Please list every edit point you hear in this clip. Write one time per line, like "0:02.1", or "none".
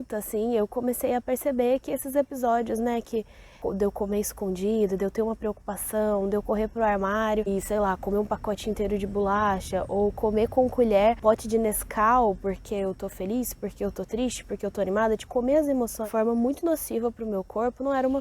0:03.6
0:07.5
0:11.2
0:16.1